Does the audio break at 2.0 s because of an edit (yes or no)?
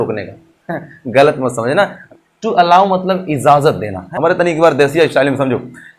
yes